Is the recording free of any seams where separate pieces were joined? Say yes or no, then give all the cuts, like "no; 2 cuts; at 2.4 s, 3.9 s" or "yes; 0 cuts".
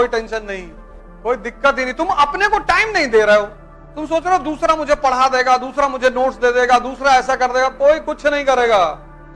yes; 0 cuts